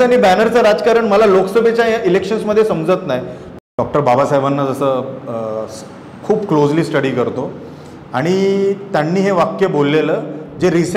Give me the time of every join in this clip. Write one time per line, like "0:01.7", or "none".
0:03.4